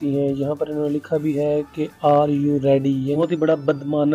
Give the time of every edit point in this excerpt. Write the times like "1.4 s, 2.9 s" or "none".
3.2 s

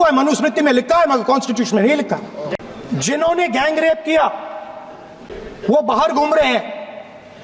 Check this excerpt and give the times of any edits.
2.5 s

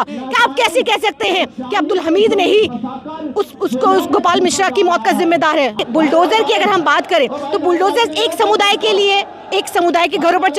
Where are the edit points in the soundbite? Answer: 5.8 s

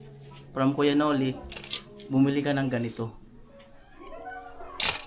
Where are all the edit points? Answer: none

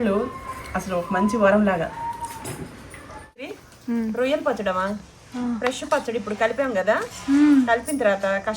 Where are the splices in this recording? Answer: 3.3 s

